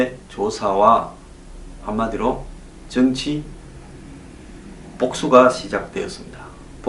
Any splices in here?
no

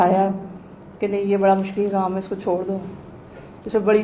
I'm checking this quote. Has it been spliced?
no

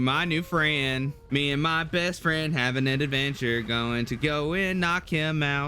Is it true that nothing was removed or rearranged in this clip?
no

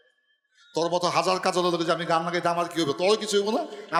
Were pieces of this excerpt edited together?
no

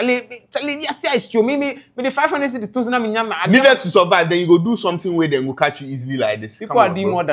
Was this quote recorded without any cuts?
yes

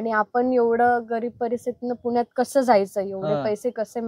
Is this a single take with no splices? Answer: yes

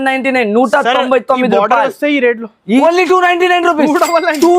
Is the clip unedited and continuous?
no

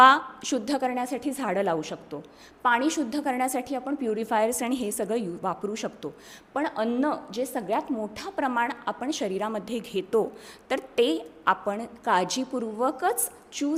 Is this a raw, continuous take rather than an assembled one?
yes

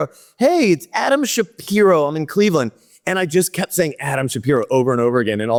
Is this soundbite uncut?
yes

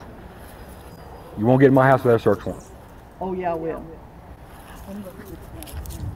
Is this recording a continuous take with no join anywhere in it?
yes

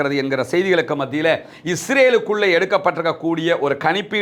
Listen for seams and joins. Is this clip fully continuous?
yes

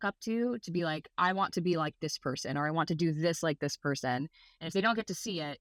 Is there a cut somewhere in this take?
no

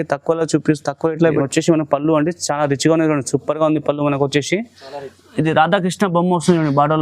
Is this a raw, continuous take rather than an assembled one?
no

